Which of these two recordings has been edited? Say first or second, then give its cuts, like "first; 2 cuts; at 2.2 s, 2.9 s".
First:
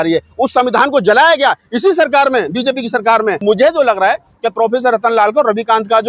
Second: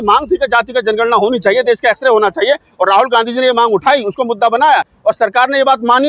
first; 1 cut; at 3.4 s